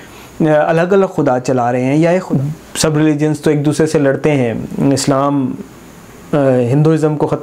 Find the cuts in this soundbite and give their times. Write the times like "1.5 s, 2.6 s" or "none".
2.3 s